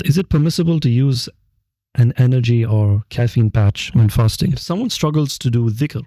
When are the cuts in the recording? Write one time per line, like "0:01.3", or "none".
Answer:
0:04.6